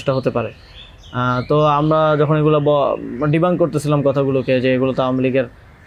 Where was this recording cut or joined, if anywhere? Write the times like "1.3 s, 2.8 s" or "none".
none